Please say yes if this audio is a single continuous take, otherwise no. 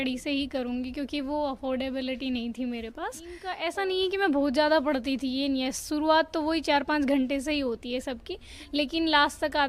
no